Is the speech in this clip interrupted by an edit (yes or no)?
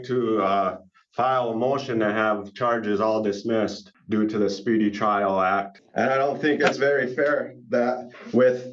yes